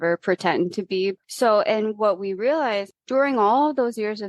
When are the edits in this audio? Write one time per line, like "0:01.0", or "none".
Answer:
0:01.1
0:02.9